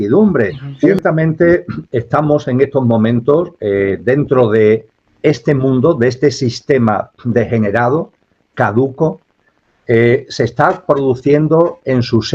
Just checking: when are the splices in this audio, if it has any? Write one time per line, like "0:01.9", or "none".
0:01.0